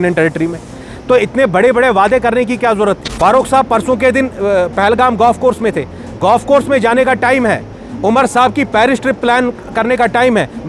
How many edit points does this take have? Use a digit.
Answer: 1